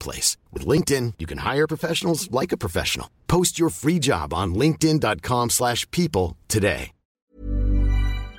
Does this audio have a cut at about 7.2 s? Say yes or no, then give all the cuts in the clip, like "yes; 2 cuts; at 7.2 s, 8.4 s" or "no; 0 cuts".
yes; 1 cut; at 7.2 s